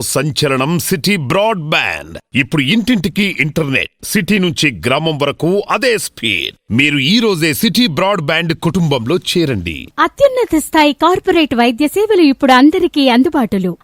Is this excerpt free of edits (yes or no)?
yes